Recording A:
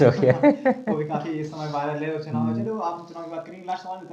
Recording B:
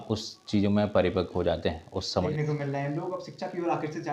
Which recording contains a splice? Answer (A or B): B